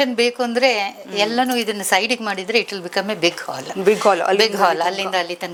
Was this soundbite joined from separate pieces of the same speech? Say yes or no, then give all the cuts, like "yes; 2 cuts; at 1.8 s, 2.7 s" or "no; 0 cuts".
no; 0 cuts